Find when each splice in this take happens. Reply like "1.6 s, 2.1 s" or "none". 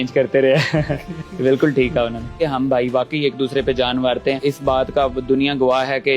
2.4 s, 4.4 s

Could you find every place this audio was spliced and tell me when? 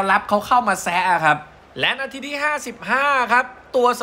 1.6 s

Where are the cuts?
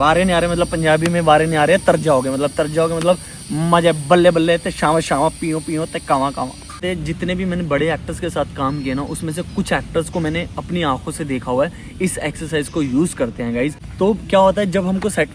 6.8 s, 13.8 s

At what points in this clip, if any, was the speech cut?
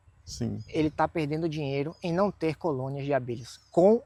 none

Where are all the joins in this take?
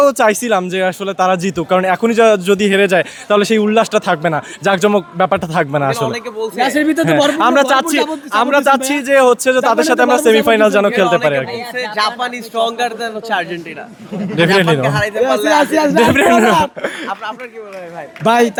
none

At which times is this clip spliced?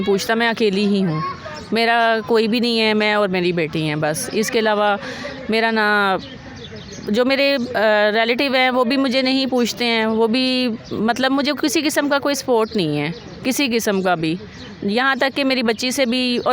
none

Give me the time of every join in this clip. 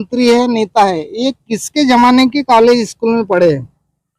none

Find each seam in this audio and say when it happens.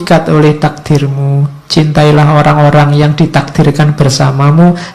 none

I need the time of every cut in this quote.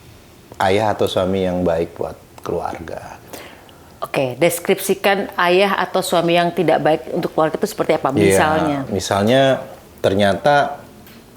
none

